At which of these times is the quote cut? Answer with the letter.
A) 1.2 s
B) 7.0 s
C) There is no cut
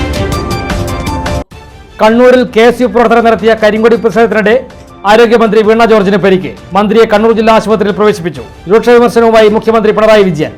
A